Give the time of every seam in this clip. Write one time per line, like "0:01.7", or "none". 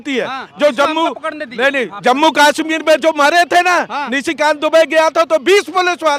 none